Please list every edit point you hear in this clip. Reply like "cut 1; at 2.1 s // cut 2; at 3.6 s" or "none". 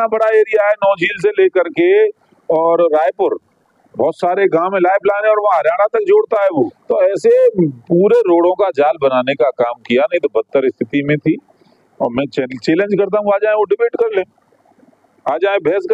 cut 1; at 6.8 s